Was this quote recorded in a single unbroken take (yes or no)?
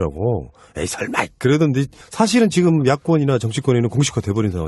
yes